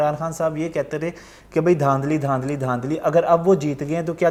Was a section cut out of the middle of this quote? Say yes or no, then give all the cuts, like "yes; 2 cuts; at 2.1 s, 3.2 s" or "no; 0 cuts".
no; 0 cuts